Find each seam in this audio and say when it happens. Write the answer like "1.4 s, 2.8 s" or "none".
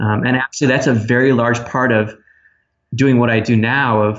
none